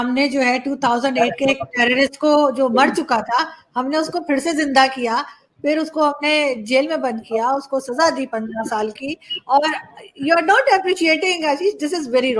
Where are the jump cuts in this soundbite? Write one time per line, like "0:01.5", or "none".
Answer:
none

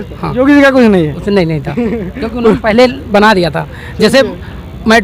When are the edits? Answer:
none

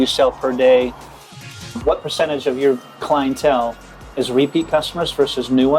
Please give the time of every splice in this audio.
0:01.3

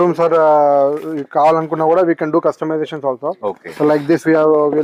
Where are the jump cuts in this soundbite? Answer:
none

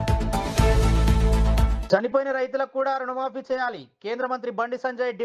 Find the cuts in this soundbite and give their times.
none

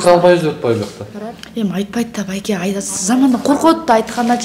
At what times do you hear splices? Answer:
none

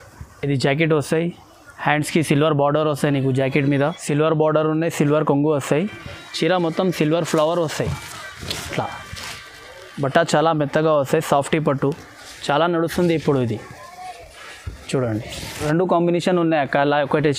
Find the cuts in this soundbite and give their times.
0:04.0
0:15.6

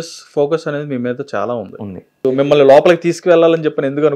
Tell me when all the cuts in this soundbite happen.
0:02.3

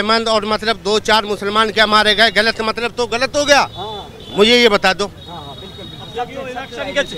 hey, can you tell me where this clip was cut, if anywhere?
none

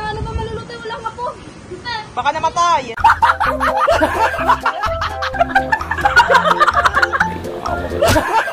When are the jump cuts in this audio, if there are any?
none

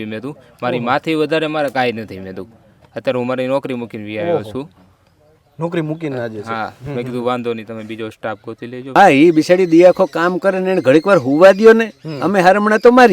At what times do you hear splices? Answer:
0:08.9

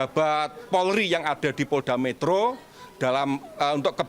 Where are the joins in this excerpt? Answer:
none

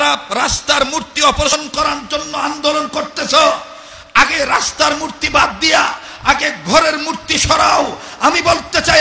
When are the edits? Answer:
0:01.5

